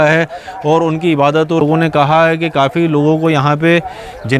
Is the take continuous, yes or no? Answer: no